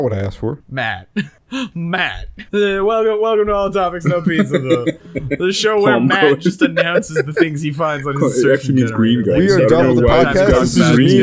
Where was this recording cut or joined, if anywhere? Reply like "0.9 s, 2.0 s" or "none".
none